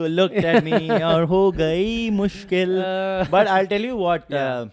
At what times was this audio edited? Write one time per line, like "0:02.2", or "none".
none